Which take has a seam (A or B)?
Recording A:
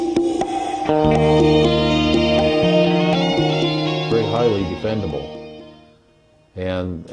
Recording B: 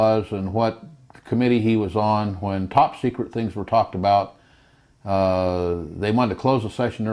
A